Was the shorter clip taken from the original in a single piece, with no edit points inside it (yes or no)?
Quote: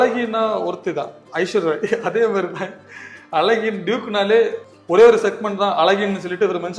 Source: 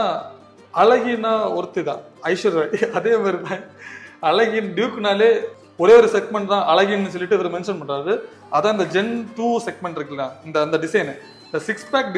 yes